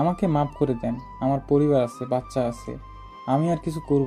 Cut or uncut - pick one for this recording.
uncut